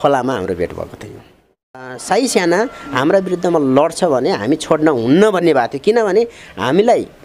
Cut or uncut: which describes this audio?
cut